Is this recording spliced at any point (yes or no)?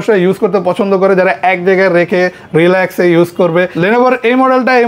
yes